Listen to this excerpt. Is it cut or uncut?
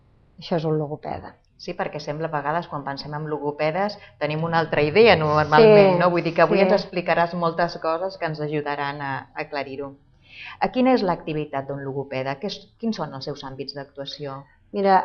uncut